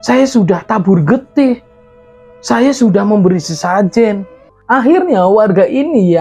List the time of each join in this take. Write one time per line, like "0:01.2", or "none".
0:04.5